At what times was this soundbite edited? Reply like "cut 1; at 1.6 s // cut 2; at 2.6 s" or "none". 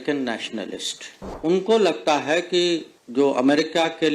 cut 1; at 1.2 s // cut 2; at 3.0 s